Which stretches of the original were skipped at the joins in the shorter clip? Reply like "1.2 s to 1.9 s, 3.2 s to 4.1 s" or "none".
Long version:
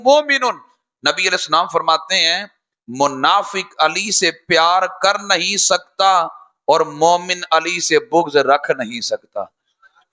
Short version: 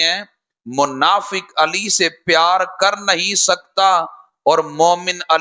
none